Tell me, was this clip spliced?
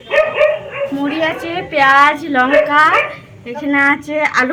no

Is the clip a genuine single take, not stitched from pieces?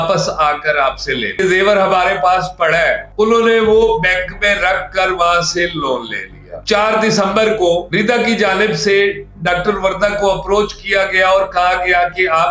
no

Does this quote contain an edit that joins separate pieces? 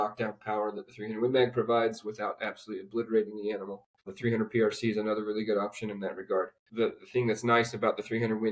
yes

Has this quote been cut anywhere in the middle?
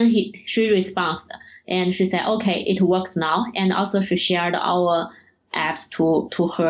no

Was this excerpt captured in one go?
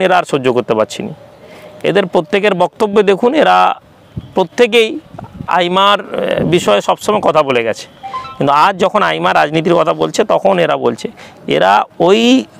yes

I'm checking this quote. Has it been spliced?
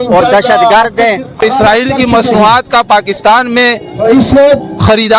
yes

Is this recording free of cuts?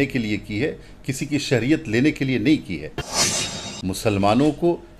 no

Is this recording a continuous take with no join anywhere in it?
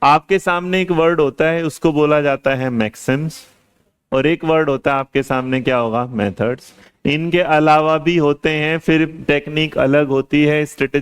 no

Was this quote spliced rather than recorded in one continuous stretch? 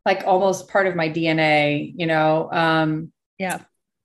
no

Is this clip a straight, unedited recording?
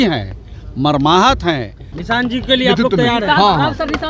no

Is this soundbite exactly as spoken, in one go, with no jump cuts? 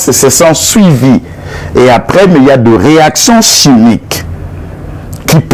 yes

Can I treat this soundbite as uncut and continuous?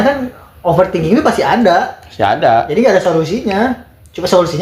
yes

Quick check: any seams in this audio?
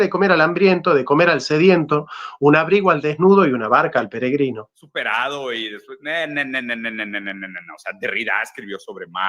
yes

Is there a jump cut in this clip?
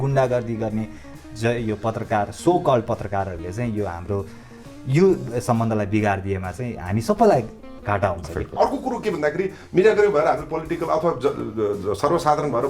yes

